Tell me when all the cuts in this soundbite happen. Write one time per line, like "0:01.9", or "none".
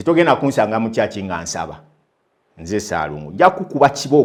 none